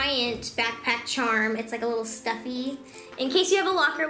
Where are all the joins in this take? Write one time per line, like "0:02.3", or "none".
0:03.1